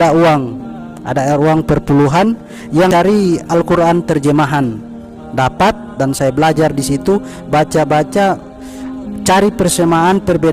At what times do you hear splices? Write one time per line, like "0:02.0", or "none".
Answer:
0:02.9